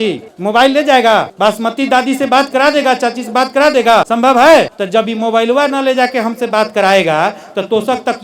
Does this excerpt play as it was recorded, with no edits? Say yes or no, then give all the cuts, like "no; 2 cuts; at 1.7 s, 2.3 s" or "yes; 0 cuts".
no; 3 cuts; at 1.3 s, 4.1 s, 4.8 s